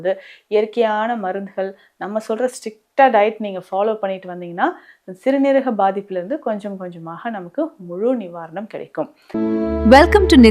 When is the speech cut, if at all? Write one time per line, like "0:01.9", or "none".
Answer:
0:09.2